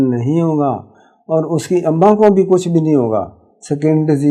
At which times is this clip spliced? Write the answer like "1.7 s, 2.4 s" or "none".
none